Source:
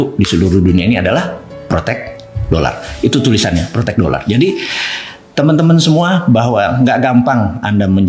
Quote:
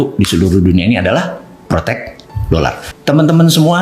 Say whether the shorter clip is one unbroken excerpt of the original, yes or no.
no